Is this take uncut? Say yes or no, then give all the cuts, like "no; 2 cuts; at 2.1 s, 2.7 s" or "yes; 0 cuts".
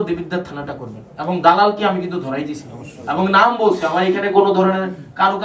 yes; 0 cuts